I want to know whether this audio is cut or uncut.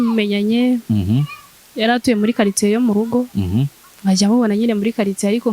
cut